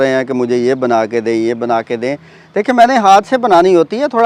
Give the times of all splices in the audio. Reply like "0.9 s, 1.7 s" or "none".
none